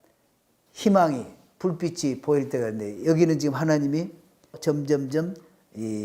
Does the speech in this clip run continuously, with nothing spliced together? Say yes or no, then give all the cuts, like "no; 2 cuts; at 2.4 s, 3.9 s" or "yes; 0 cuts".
no; 1 cut; at 4.5 s